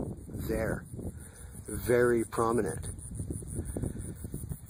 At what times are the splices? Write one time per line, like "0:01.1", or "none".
none